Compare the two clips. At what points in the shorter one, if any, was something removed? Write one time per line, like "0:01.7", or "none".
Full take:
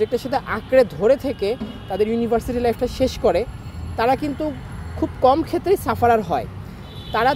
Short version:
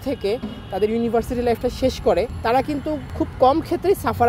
0:02.7